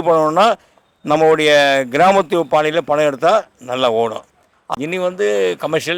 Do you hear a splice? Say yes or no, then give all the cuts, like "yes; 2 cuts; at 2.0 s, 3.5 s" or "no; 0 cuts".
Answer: yes; 1 cut; at 4.7 s